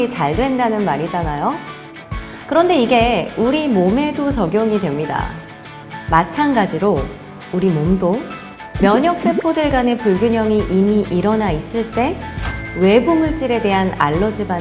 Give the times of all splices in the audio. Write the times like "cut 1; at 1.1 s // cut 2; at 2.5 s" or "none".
cut 1; at 5.7 s